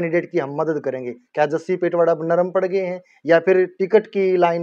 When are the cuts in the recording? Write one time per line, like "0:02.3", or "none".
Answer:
none